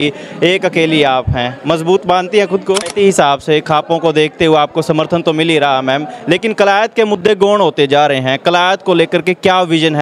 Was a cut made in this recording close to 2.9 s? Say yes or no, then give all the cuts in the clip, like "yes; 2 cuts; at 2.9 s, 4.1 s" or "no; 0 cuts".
yes; 1 cut; at 2.9 s